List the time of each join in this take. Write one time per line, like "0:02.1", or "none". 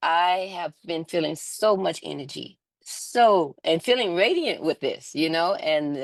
none